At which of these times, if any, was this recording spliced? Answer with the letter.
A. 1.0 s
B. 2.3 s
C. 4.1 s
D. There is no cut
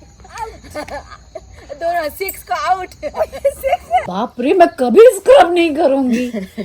C